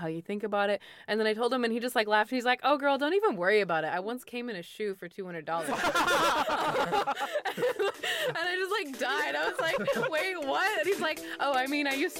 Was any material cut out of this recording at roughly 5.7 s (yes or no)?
yes